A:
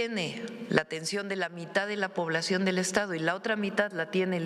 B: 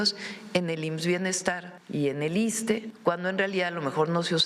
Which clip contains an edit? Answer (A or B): B